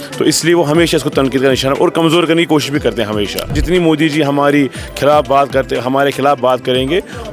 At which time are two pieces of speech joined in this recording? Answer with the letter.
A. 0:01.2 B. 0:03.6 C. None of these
B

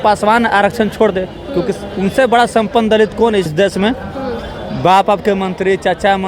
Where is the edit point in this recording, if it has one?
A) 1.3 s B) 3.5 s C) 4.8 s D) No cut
B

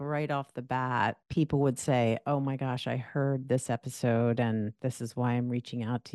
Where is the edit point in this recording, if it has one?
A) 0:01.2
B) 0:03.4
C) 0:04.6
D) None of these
A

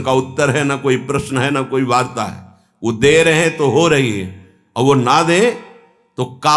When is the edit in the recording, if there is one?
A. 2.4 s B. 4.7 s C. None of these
C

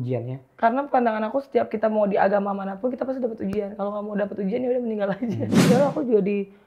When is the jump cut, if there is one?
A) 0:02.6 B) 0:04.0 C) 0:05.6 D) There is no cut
C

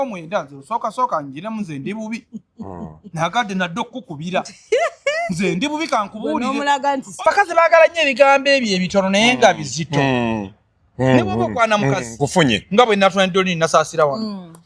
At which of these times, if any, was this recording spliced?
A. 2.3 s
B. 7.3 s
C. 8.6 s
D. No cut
B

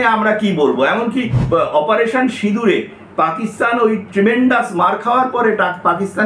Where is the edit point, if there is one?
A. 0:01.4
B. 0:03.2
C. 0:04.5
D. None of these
A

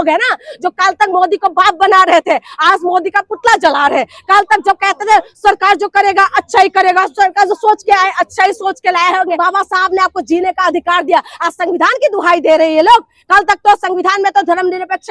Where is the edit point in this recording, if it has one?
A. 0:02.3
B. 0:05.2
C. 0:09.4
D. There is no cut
C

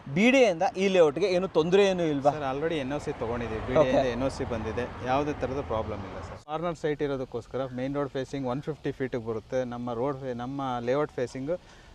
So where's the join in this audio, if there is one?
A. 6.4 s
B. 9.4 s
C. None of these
A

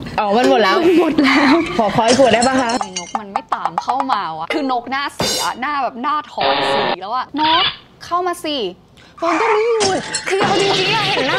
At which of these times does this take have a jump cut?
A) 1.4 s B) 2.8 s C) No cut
B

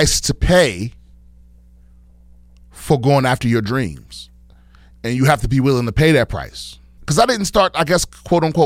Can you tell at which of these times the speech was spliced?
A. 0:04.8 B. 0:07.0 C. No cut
B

